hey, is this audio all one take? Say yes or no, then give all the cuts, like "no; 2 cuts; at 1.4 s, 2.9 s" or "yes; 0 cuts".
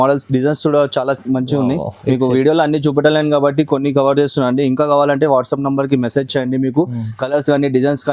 yes; 0 cuts